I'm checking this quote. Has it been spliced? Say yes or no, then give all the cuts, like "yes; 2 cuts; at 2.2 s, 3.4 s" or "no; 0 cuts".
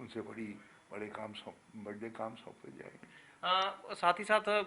no; 0 cuts